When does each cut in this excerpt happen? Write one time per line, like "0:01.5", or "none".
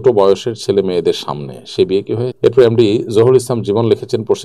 0:02.3